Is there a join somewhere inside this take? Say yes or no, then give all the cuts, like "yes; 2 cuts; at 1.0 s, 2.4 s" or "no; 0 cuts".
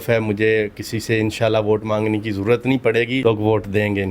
yes; 1 cut; at 3.2 s